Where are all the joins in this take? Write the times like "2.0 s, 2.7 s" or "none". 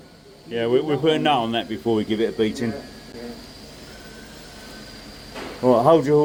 none